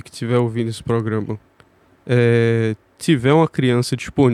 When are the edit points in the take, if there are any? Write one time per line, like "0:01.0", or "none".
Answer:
none